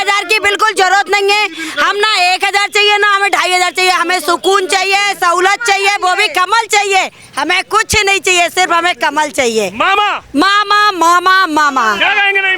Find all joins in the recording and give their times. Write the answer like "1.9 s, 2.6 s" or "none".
none